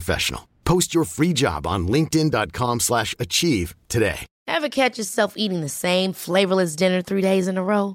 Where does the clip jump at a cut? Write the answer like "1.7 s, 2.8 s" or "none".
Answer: 4.3 s